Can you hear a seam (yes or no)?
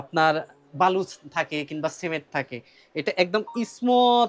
no